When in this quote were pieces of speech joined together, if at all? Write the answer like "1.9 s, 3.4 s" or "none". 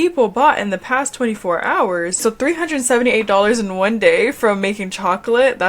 2.2 s

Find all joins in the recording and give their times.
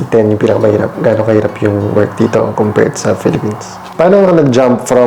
2.5 s, 3.9 s

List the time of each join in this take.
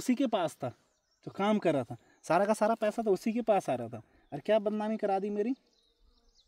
none

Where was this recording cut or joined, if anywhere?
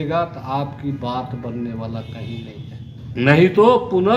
3.1 s

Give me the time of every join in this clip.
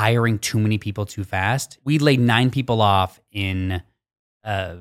1.7 s

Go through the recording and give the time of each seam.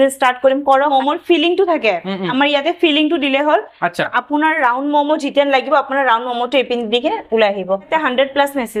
0.9 s, 7.9 s

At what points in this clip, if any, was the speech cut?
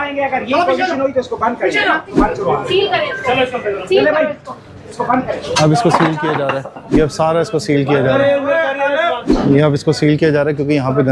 2.1 s, 6.8 s, 9.2 s

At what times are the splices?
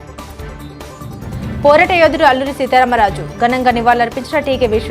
1.2 s

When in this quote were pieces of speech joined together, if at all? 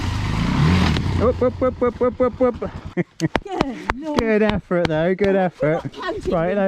3.1 s

